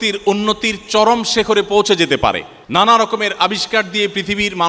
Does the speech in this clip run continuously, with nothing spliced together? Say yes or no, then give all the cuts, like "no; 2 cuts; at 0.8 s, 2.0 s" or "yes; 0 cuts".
no; 1 cut; at 2.5 s